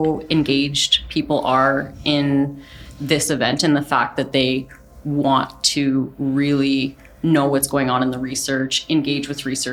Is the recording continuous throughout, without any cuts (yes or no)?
yes